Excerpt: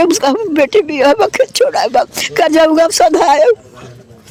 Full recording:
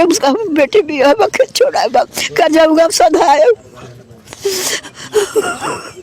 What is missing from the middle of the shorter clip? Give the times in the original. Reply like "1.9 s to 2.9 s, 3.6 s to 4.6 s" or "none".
none